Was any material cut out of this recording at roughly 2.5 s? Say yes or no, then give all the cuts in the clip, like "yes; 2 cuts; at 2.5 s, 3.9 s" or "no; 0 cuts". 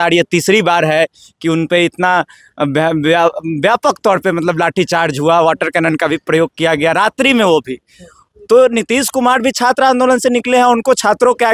no; 0 cuts